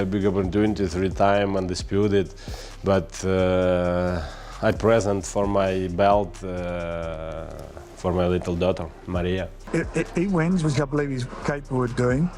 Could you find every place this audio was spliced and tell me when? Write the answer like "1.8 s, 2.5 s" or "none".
9.8 s

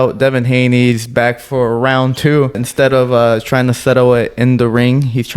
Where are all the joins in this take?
2.6 s

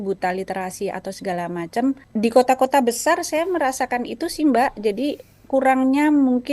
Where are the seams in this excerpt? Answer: 2.0 s

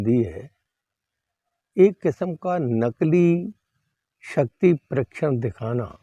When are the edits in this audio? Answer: none

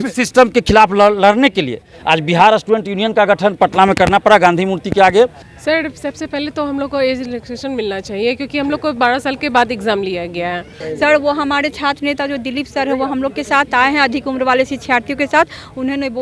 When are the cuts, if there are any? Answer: 5.5 s, 10.7 s

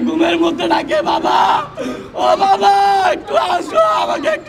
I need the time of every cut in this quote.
none

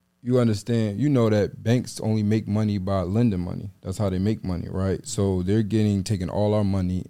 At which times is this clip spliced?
none

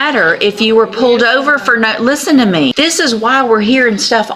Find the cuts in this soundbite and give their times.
2.7 s

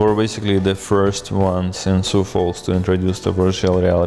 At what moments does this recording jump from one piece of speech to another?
none

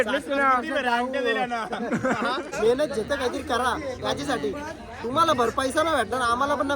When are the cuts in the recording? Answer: 2.5 s

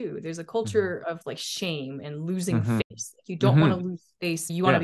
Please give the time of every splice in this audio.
none

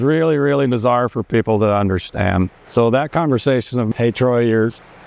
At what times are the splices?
2.6 s

